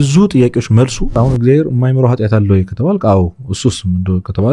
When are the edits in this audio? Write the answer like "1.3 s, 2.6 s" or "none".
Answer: 1.2 s